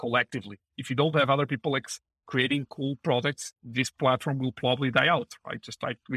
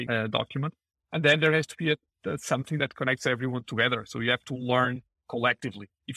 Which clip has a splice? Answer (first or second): second